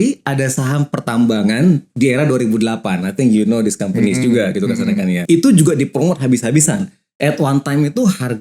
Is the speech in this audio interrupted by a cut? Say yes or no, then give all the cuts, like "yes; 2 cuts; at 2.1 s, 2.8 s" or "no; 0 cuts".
yes; 1 cut; at 5.2 s